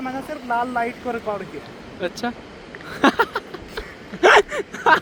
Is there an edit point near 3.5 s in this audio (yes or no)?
no